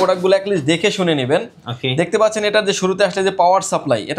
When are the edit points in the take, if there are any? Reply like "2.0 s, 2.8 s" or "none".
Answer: none

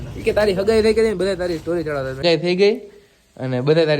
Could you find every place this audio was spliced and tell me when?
2.2 s

